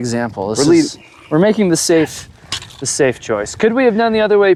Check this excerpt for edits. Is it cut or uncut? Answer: uncut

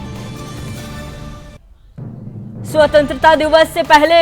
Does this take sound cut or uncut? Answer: cut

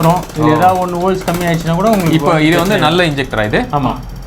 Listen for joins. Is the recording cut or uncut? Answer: uncut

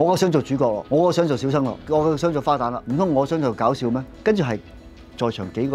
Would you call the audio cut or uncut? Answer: cut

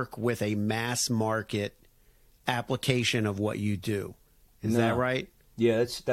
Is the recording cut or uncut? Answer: uncut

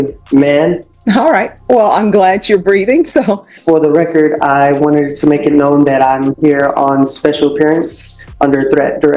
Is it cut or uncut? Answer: cut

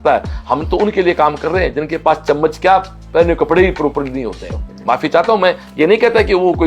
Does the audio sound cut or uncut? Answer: uncut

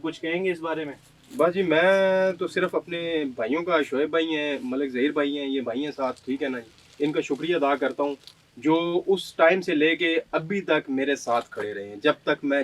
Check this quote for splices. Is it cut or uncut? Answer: uncut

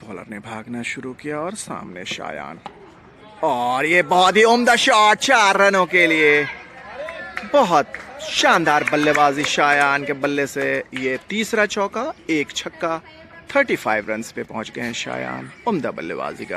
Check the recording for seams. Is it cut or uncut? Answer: uncut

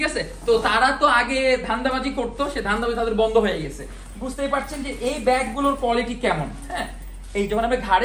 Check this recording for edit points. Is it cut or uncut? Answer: uncut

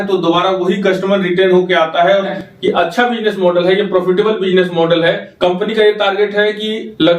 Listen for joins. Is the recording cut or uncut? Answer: cut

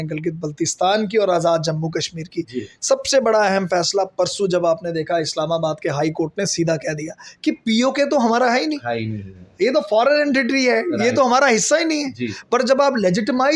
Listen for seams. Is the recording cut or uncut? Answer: uncut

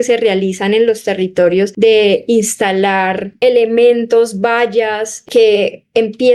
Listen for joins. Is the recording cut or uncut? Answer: cut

